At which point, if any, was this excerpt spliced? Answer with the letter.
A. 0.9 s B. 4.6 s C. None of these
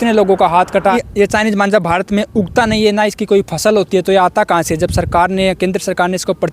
A